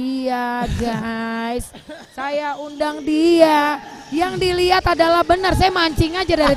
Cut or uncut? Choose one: uncut